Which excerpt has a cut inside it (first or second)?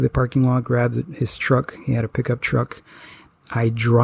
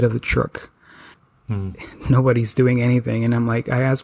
second